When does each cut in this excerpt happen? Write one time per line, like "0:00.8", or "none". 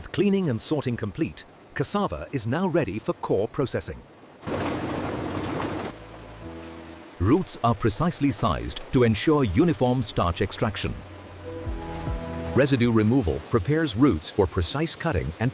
0:05.9
0:12.5